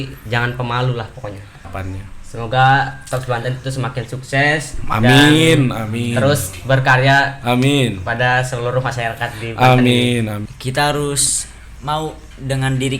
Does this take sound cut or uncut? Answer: cut